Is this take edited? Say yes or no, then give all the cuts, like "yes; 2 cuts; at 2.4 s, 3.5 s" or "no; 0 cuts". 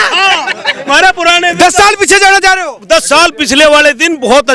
no; 0 cuts